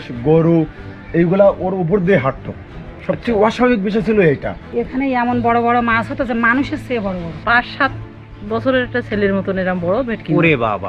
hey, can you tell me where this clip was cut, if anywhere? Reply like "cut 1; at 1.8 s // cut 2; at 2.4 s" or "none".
none